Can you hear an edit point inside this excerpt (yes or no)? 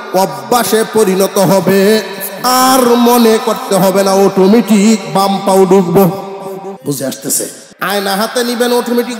yes